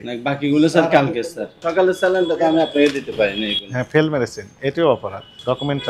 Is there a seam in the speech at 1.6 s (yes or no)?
yes